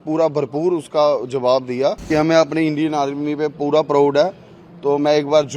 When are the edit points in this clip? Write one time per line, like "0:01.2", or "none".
0:02.1